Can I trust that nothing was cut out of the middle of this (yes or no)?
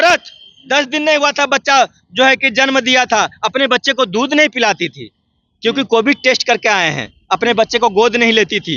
yes